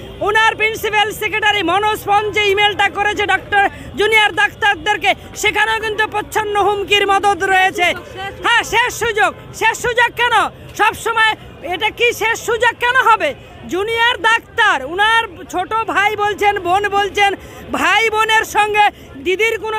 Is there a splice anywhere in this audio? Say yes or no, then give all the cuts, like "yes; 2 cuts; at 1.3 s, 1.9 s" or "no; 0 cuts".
no; 0 cuts